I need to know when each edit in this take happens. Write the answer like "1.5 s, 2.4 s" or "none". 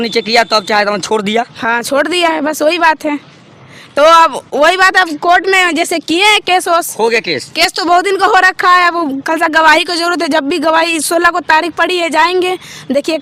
none